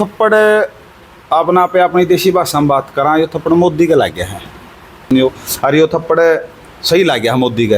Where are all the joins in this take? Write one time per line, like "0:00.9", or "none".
0:05.4